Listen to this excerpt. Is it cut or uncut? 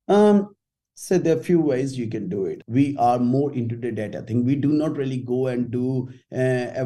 cut